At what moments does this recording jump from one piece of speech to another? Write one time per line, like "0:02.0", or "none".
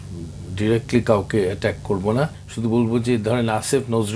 0:02.4